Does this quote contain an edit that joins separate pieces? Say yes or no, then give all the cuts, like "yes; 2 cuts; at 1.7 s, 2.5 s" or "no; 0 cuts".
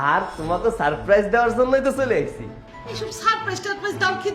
no; 0 cuts